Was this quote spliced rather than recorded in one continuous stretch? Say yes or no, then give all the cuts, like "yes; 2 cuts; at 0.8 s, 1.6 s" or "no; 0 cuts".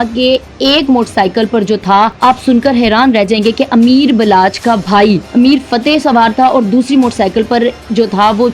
yes; 2 cuts; at 2.1 s, 5.2 s